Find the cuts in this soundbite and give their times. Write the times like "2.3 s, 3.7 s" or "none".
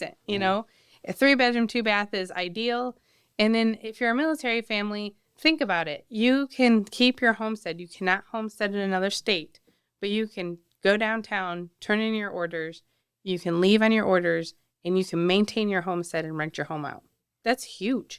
none